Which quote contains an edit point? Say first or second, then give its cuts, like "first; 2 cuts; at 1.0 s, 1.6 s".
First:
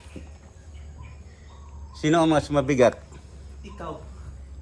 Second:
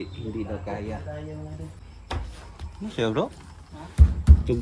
second; 1 cut; at 1.9 s